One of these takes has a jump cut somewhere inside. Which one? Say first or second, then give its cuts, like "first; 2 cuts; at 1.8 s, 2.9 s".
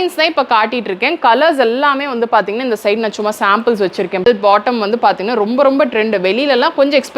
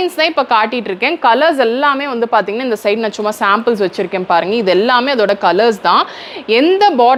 first; 1 cut; at 4.2 s